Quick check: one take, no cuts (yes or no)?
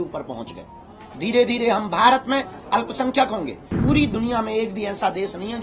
no